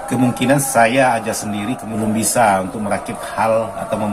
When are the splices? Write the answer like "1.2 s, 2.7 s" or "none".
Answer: 1.9 s